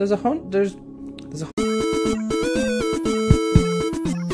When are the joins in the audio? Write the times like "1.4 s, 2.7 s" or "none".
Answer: none